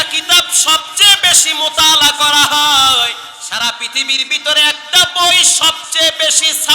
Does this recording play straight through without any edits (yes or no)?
no